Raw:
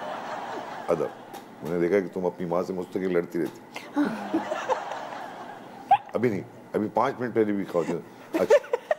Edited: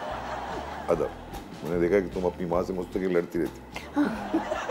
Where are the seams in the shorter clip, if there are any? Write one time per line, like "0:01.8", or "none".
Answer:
none